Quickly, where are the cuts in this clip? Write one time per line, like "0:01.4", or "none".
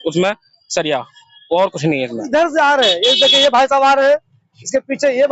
0:02.2